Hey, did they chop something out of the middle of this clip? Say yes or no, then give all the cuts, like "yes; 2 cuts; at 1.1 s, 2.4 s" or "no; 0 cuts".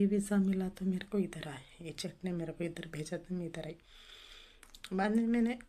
no; 0 cuts